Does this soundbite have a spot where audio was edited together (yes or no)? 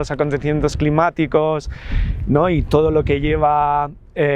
no